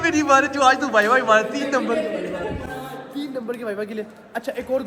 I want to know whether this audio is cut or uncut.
uncut